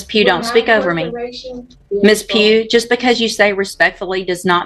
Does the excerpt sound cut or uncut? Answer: cut